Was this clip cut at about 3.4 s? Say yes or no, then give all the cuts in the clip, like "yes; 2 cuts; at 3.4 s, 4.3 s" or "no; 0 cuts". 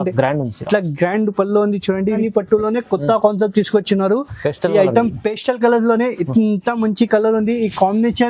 no; 1 cut; at 2.2 s